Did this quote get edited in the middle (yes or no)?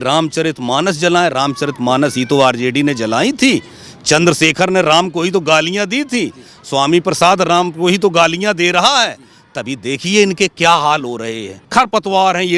yes